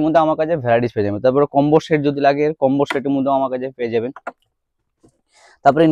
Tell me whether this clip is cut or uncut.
uncut